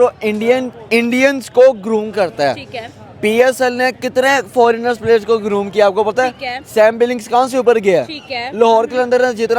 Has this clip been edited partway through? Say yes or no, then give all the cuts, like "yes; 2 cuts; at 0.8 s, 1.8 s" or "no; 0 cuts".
no; 0 cuts